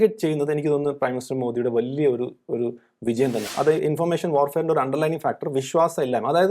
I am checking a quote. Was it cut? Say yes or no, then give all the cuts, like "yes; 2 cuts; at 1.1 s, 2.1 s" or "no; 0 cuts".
yes; 1 cut; at 3.5 s